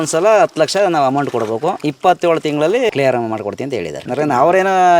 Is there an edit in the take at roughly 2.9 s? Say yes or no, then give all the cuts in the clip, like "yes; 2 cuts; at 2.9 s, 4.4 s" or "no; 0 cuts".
yes; 3 cuts; at 1.9 s, 2.9 s, 4.1 s